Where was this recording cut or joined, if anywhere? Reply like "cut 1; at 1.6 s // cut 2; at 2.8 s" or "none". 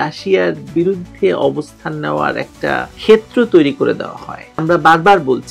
cut 1; at 4.6 s